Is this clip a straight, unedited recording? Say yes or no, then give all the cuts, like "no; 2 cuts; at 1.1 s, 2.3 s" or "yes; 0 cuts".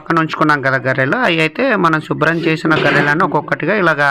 yes; 0 cuts